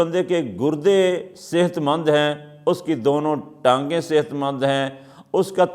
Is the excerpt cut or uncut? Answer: uncut